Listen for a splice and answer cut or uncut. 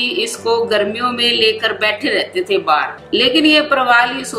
cut